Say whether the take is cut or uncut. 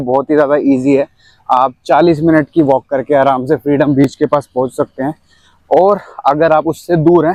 uncut